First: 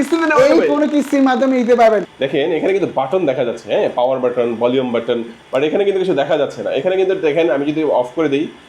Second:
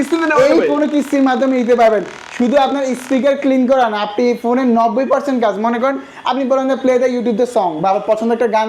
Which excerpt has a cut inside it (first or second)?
first